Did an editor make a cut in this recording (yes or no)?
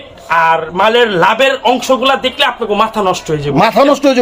no